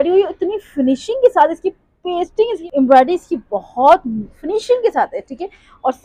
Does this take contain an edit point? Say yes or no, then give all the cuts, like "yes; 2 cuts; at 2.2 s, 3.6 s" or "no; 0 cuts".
no; 0 cuts